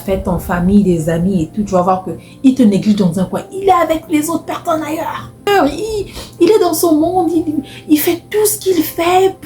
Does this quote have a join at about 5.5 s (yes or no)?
yes